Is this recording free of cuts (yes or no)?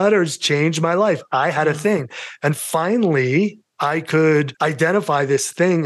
no